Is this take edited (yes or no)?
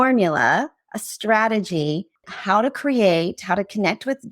yes